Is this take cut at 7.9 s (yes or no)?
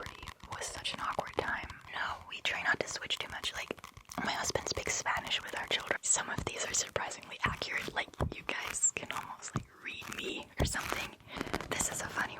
no